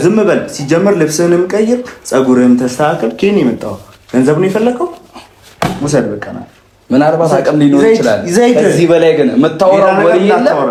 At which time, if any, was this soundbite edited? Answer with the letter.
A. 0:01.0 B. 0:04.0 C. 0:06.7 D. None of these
D